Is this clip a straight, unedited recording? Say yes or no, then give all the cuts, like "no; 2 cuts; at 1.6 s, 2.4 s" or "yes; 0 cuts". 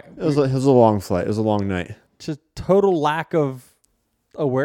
no; 1 cut; at 2.1 s